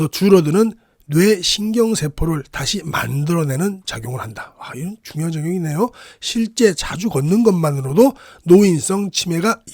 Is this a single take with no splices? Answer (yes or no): yes